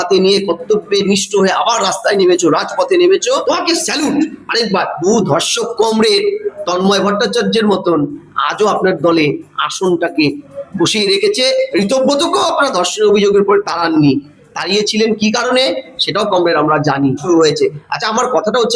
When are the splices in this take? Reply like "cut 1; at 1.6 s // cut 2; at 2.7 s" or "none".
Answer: cut 1; at 3.4 s // cut 2; at 5.0 s // cut 3; at 17.2 s